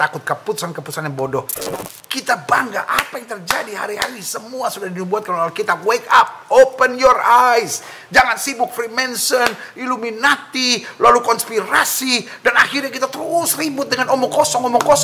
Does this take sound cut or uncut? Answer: cut